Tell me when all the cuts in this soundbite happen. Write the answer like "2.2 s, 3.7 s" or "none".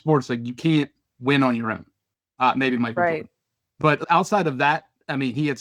4.0 s